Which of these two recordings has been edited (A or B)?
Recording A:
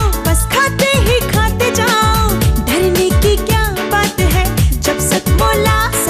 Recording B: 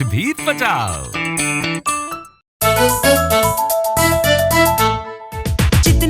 B